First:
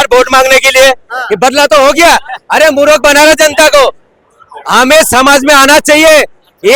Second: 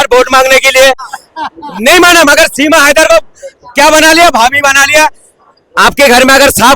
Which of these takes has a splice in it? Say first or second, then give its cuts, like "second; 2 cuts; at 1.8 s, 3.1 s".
second; 1 cut; at 1.1 s